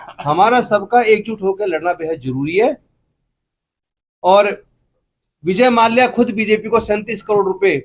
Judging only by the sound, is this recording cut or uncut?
uncut